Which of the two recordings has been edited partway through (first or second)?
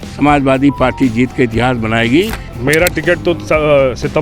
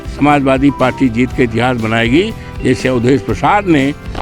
first